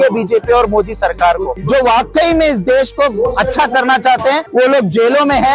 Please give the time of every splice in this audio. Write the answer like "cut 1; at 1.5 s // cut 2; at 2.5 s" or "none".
cut 1; at 1.5 s